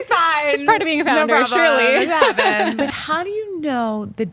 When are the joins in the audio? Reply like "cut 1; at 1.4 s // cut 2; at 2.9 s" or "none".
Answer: cut 1; at 2.8 s